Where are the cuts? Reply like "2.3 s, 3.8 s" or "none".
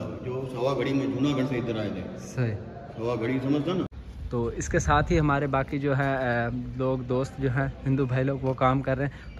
4.0 s

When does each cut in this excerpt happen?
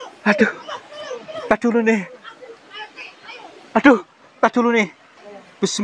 none

